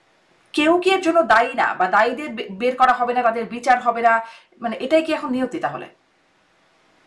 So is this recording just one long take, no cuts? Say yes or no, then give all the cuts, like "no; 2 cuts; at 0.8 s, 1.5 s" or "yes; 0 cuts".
yes; 0 cuts